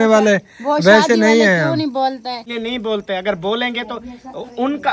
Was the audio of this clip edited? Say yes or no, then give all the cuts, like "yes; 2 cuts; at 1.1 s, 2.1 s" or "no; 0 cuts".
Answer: yes; 1 cut; at 2.5 s